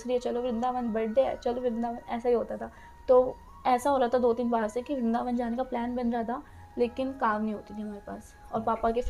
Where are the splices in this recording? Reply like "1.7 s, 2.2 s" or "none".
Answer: none